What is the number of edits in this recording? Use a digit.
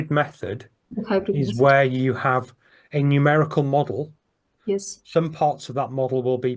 0